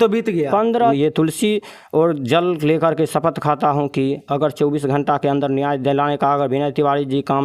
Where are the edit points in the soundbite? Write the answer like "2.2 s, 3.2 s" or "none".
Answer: 0.9 s